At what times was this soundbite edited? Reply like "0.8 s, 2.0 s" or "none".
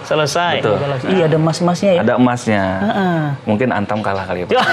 0.9 s